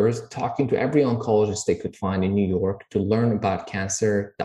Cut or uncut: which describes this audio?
uncut